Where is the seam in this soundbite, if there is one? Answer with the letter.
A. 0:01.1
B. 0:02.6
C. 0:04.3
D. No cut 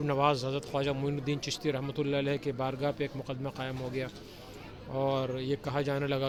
D